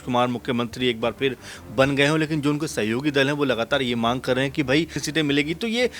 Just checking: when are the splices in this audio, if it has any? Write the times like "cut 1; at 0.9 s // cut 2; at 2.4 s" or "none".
cut 1; at 5.0 s

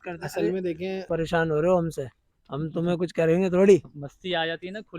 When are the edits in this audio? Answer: cut 1; at 1.1 s

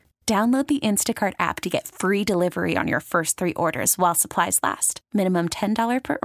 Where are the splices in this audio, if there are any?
none

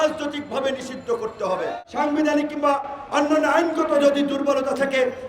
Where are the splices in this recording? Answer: cut 1; at 1.7 s

